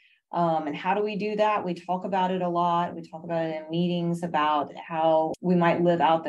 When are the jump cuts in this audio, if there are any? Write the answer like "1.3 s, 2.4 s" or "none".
5.4 s

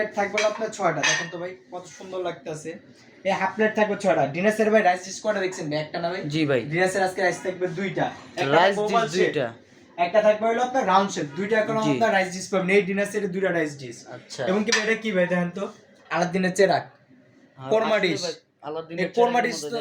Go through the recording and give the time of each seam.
none

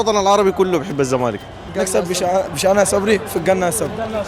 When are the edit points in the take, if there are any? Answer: 1.6 s

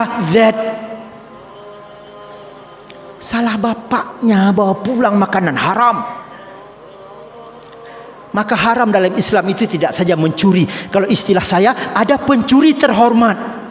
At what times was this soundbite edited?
1.2 s, 2.7 s

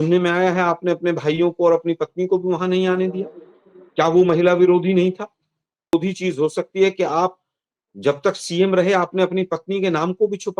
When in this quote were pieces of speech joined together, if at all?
5.9 s

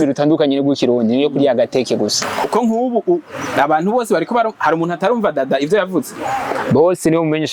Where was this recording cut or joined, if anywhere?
2.2 s

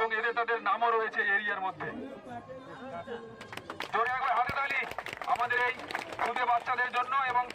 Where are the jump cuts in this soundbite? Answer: none

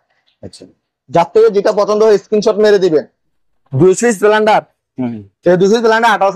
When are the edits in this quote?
3.2 s

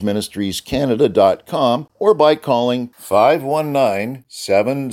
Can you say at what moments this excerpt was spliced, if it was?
1.9 s

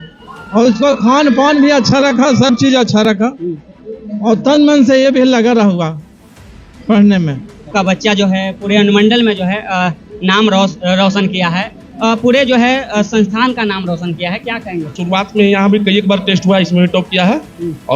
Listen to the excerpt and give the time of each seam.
7.7 s, 14.9 s

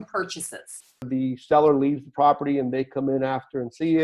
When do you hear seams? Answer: 1.1 s

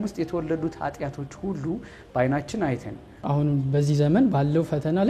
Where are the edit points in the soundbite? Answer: 3.1 s

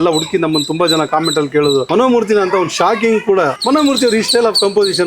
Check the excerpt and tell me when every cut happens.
1.9 s, 3.6 s

